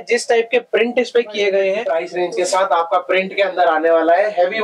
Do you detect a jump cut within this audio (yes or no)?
yes